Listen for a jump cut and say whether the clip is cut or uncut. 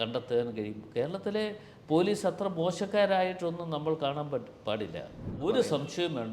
cut